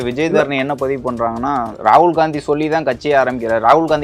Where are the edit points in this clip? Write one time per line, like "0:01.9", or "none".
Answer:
none